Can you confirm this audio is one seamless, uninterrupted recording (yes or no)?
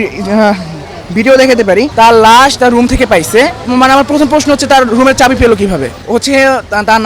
no